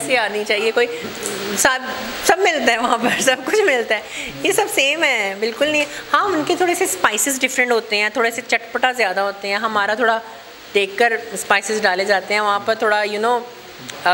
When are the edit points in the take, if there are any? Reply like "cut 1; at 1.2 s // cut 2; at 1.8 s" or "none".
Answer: cut 1; at 1.1 s